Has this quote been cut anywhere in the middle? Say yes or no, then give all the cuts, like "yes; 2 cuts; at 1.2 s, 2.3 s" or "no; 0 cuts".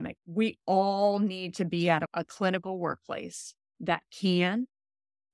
yes; 1 cut; at 2.1 s